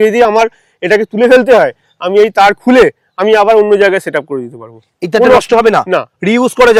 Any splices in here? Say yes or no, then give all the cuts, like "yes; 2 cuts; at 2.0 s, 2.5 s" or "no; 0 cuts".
no; 0 cuts